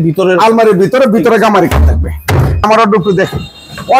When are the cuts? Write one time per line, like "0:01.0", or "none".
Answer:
0:02.6

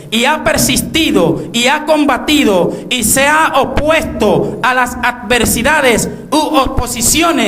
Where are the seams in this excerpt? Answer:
0:03.4

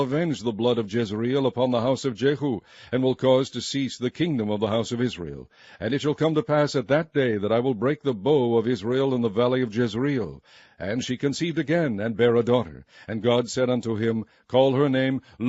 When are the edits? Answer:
none

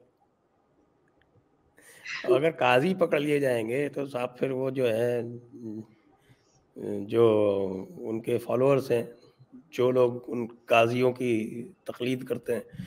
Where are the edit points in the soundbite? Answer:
none

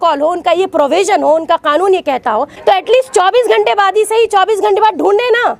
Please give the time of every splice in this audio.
0:02.5

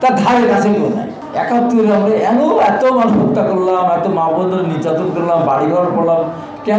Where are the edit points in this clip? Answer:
0:01.2

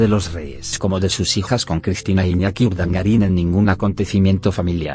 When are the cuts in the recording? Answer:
0:02.3

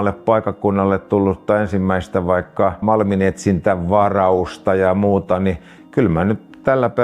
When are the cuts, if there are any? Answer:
0:02.8

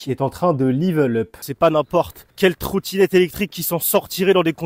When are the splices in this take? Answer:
0:01.3
0:02.2

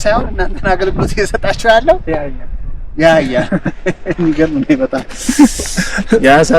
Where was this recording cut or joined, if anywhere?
none

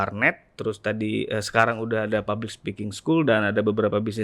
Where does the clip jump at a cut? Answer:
none

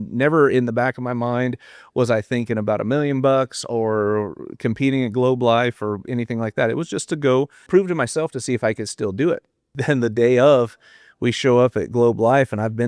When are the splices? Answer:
0:07.7
0:09.7

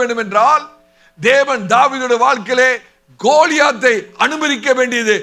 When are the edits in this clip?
none

